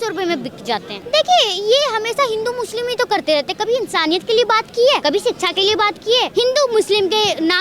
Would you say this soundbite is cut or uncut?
cut